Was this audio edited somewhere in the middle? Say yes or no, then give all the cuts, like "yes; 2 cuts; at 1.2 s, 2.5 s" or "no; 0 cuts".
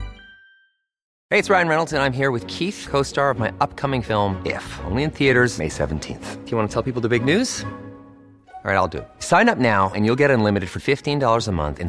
yes; 1 cut; at 1.0 s